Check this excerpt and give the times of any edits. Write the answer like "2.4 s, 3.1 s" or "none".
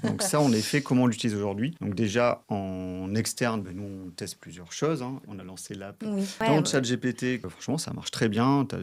1.8 s, 2.4 s, 5.3 s, 6.4 s, 7.5 s